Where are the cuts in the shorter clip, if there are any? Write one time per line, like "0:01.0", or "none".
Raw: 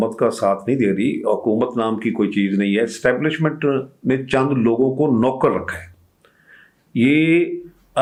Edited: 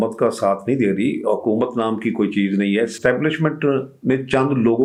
none